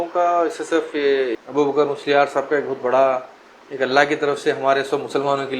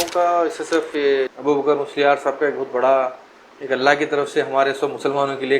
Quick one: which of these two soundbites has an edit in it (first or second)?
second